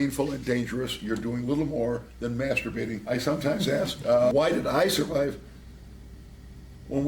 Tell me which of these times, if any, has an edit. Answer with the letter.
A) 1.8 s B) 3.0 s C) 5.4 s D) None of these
B